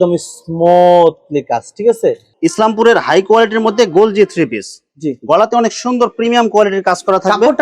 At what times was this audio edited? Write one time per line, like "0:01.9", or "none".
0:02.3